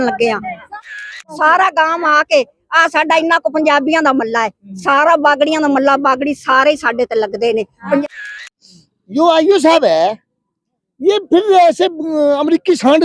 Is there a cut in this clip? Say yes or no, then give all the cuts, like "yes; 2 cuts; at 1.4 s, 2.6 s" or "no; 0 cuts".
yes; 2 cuts; at 1.0 s, 8.5 s